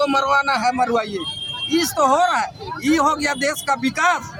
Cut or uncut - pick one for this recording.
uncut